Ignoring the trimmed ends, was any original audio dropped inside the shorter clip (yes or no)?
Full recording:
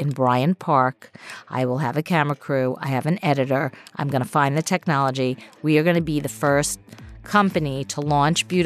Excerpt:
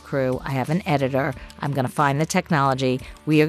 no